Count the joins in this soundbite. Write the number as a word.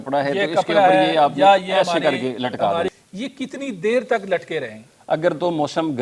one